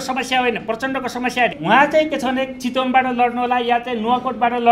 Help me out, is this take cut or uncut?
cut